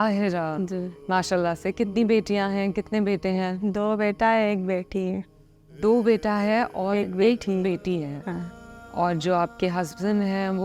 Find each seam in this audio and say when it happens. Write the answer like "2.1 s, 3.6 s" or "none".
1.0 s